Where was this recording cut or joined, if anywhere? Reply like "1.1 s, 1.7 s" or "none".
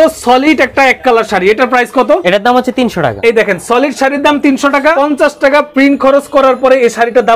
2.2 s, 3.2 s, 4.9 s